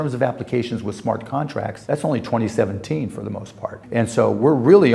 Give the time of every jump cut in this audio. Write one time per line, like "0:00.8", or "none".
0:01.8
0:03.8